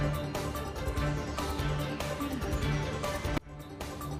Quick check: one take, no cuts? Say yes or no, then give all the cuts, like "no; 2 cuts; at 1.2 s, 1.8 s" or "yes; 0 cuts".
yes; 0 cuts